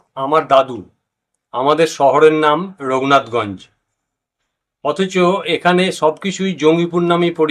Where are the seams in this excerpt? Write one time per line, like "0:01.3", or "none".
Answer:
none